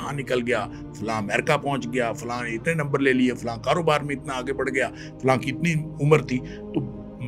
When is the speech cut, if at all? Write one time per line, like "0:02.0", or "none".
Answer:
none